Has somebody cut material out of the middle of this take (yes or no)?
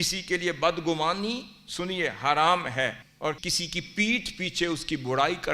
yes